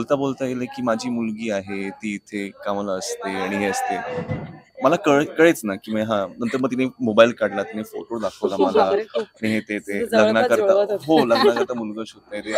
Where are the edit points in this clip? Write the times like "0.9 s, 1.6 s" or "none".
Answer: none